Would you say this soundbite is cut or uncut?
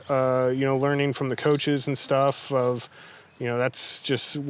uncut